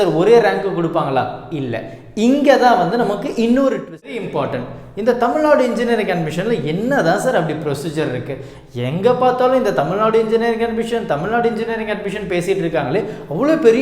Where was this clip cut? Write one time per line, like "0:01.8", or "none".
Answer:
0:04.2

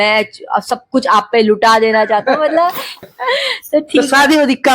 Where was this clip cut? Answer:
0:02.9

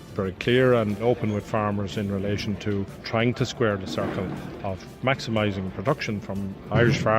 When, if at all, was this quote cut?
0:01.0
0:03.0

